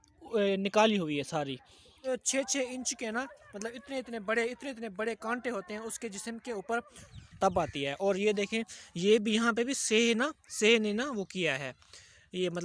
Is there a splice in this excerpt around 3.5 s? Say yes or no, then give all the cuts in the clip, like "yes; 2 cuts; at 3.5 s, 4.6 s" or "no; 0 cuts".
no; 2 cuts; at 2.0 s, 7.1 s